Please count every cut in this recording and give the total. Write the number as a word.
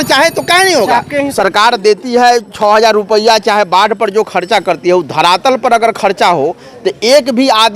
one